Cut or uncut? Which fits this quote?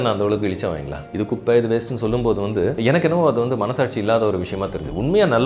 cut